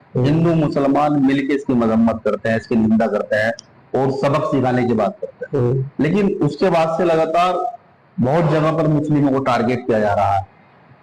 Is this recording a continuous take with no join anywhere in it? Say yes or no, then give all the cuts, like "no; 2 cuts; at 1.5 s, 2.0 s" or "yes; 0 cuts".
yes; 0 cuts